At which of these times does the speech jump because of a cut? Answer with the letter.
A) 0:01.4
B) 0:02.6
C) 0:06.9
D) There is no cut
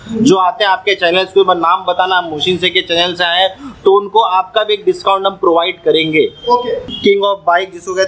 C